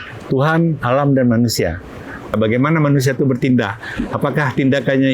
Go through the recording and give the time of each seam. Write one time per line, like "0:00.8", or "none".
0:02.3